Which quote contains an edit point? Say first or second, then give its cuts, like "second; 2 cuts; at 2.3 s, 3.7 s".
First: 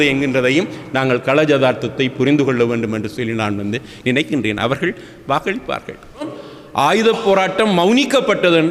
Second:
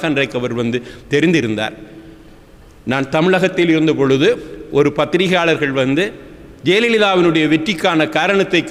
first; 1 cut; at 6.4 s